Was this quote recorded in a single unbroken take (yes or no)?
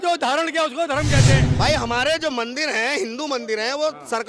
no